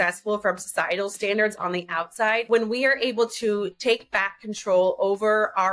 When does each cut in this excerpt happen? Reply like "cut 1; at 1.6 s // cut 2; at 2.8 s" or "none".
cut 1; at 2.5 s